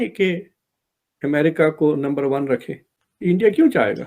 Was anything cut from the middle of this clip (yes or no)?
no